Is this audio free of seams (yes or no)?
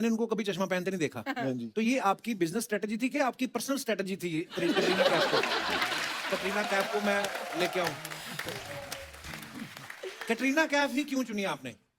yes